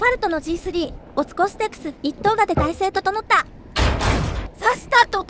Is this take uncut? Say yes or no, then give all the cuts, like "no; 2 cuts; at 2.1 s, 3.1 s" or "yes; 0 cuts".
no; 2 cuts; at 1.0 s, 4.0 s